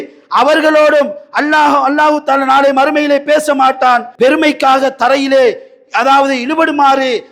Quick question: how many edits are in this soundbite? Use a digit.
1